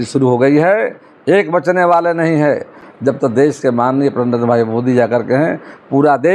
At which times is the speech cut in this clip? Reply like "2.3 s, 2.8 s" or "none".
none